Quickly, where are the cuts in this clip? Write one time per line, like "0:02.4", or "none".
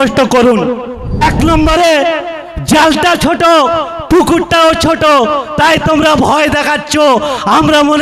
0:01.2

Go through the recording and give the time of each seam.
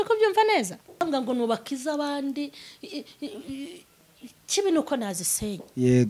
0:01.0

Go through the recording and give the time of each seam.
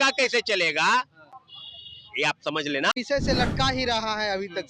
0:02.9

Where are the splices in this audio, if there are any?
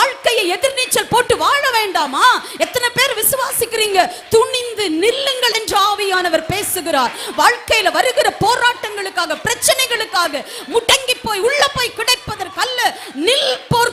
none

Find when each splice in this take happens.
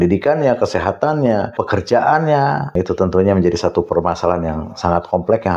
0:01.6
0:02.7

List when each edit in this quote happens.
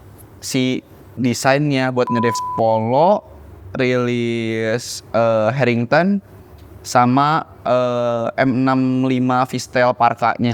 0:02.4

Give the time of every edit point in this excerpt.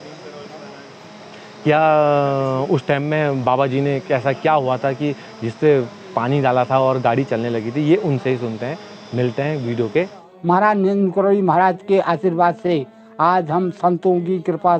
0:10.2

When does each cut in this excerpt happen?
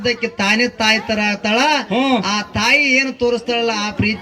none

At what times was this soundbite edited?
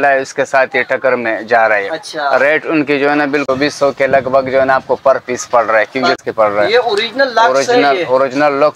0:03.5
0:06.2

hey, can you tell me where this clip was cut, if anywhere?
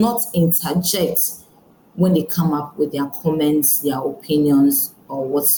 none

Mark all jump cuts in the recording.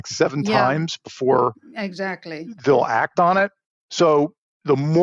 0:03.8

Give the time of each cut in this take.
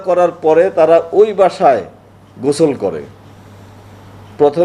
none

